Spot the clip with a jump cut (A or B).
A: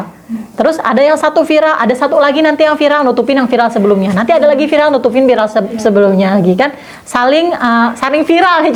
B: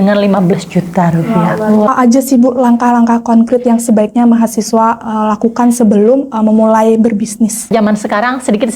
B